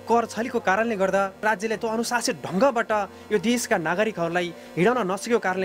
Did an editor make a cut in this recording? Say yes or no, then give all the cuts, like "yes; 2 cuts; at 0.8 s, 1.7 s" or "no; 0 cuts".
no; 0 cuts